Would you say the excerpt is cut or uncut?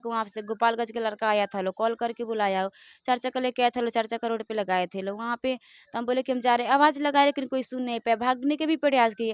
uncut